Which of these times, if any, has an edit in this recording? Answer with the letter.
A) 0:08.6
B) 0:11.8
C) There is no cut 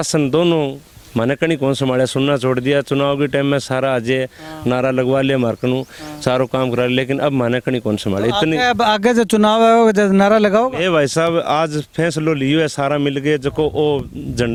C